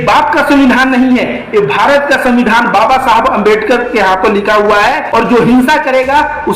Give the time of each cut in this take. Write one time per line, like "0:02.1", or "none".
0:05.0